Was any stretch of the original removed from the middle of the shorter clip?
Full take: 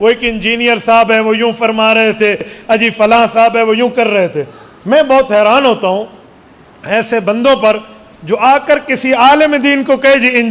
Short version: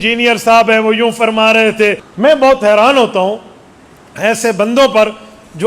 yes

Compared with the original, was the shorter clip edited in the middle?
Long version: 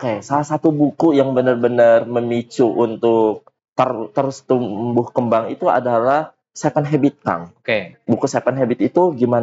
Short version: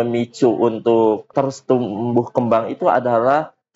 yes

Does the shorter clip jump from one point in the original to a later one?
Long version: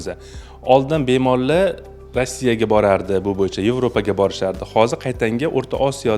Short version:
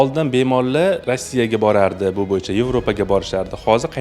yes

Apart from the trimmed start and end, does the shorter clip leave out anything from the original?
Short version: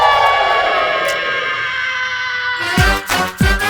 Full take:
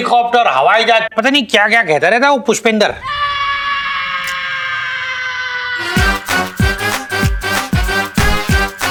no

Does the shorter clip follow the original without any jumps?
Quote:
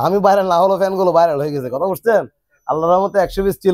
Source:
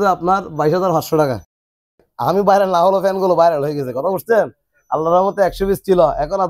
yes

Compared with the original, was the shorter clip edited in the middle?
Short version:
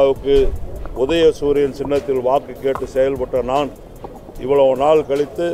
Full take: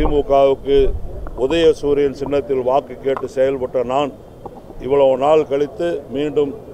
no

